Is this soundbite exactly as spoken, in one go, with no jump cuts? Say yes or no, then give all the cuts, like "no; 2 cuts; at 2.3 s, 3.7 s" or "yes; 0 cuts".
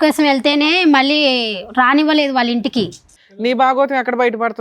no; 1 cut; at 3.1 s